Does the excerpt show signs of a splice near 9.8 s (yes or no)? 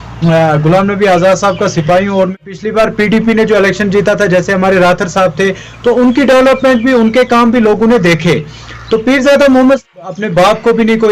yes